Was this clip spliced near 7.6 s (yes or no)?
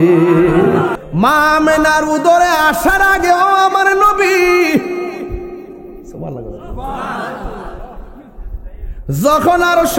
no